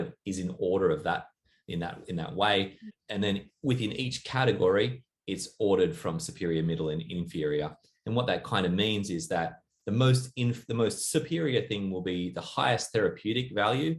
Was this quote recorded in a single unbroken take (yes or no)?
no